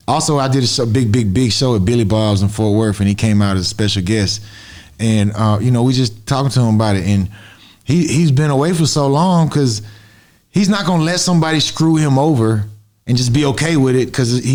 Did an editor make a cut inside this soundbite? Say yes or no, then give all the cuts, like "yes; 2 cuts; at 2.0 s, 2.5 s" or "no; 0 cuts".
no; 0 cuts